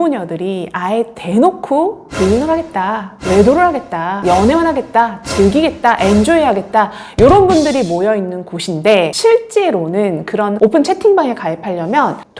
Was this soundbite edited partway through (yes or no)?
no